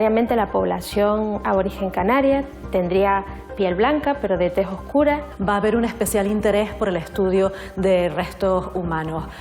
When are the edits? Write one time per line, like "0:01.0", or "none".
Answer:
0:05.3